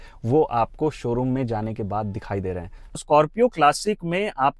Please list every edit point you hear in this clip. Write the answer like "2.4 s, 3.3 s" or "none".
3.0 s